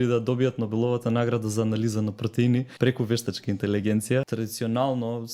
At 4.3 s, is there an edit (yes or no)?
yes